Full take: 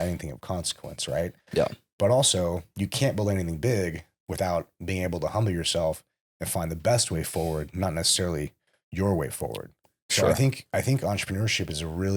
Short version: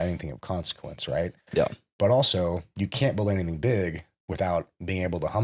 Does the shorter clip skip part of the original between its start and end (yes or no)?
no